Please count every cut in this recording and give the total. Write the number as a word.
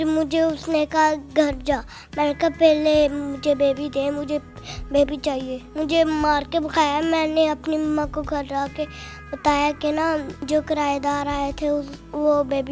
two